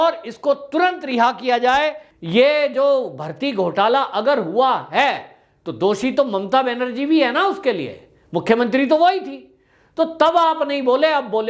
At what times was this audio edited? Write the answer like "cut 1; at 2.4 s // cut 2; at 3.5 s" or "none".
cut 1; at 2.1 s